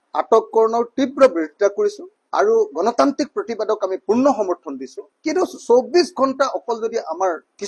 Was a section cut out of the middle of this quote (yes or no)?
no